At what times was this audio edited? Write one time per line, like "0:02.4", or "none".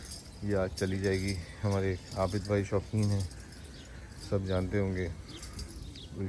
none